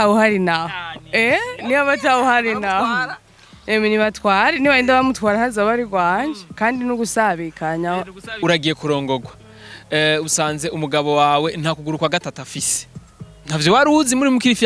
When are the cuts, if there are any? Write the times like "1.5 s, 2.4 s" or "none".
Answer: 8.2 s